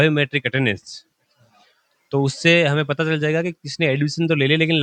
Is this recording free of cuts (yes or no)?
yes